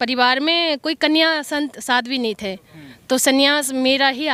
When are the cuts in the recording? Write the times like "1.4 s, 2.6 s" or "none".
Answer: none